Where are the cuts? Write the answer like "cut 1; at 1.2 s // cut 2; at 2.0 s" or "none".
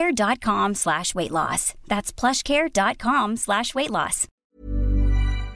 cut 1; at 4.3 s